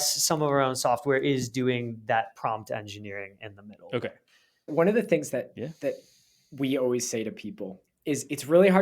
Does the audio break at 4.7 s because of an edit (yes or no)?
yes